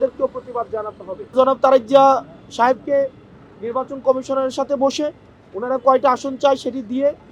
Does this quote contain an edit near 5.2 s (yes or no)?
no